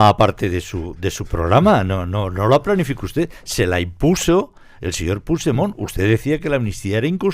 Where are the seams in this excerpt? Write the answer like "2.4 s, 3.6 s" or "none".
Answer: none